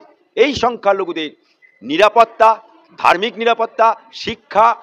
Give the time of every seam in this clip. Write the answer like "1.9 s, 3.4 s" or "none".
none